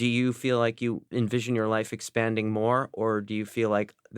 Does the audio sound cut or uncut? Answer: cut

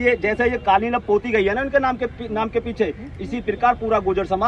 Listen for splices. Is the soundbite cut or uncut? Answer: uncut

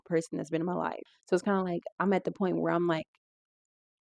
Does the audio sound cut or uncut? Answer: cut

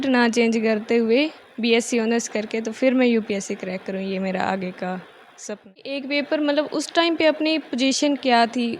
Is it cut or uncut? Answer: cut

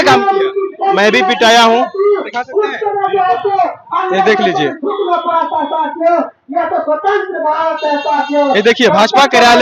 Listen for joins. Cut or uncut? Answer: uncut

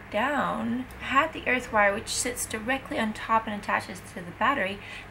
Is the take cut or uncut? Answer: cut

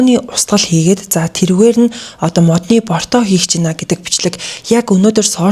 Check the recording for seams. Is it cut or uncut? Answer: uncut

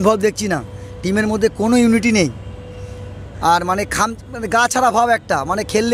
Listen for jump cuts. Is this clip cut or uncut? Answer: uncut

